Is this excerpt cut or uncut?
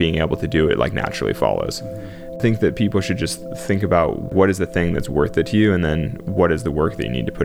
cut